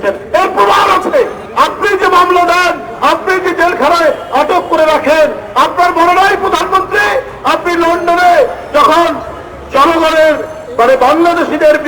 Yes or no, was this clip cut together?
yes